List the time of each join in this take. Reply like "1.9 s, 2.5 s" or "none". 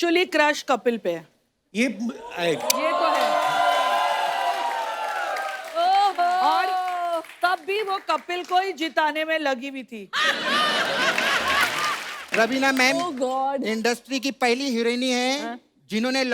12.2 s